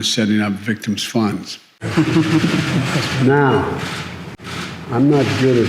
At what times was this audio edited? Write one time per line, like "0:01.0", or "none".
0:01.8